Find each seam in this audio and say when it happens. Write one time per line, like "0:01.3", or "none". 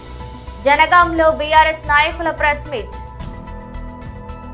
0:03.5